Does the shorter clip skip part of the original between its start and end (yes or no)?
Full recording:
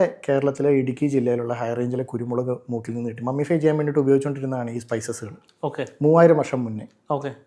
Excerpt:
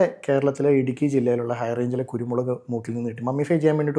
no